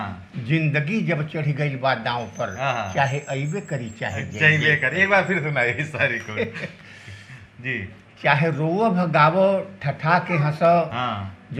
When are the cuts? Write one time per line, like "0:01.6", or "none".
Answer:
none